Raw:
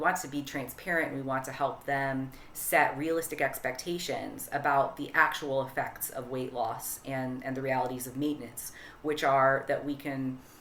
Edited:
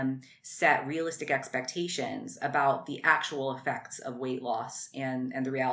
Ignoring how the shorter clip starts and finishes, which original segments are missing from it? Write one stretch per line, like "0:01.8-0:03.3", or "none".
none